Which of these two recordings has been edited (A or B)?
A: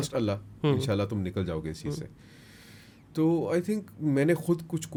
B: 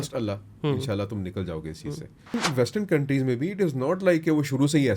B